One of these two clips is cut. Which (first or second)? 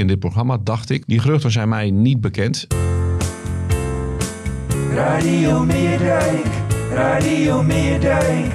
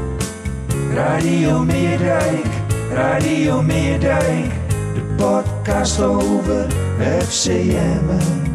first